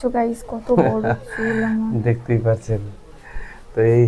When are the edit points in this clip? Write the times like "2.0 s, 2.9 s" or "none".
none